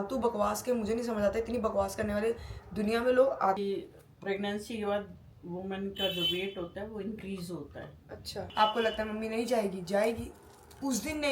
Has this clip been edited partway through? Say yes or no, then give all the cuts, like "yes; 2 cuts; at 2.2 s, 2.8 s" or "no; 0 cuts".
yes; 2 cuts; at 3.6 s, 8.4 s